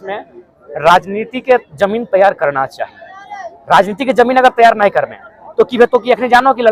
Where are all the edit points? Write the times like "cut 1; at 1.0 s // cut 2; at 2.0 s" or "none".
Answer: none